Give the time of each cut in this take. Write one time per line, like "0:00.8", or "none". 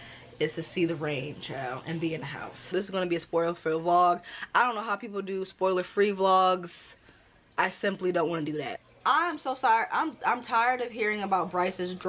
0:02.7
0:08.8